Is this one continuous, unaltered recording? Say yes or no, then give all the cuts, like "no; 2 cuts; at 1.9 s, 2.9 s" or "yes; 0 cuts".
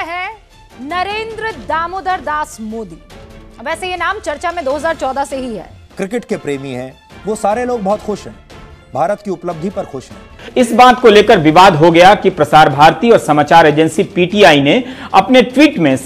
no; 2 cuts; at 5.8 s, 10.4 s